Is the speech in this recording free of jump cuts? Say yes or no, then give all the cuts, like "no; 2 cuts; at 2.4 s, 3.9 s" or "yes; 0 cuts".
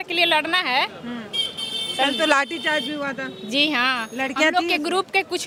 yes; 0 cuts